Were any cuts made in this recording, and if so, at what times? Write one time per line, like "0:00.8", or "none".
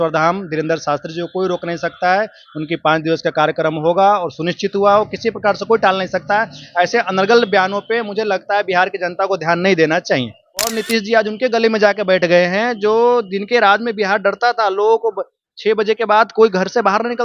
0:10.7